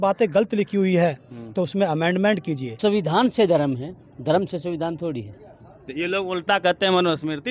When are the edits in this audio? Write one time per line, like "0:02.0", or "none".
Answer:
0:02.8